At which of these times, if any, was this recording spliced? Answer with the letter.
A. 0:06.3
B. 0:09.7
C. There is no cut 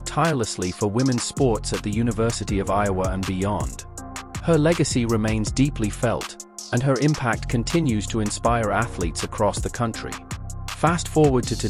C